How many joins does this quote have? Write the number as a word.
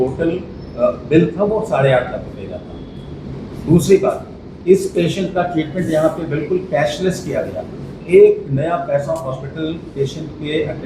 zero